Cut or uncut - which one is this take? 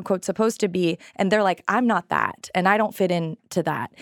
uncut